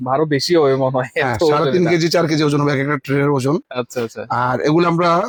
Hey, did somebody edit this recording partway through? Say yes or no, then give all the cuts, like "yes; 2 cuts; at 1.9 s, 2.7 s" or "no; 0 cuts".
no; 0 cuts